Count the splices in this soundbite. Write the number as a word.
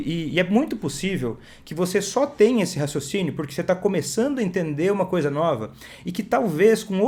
zero